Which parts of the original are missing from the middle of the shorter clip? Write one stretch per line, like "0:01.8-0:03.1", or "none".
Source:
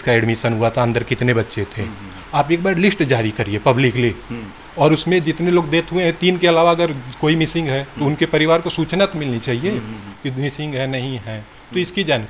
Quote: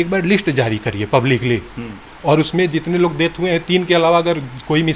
none